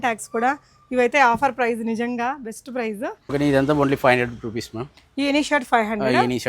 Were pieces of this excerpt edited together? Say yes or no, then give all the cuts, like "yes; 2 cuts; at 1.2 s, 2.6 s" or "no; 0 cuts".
yes; 1 cut; at 3.3 s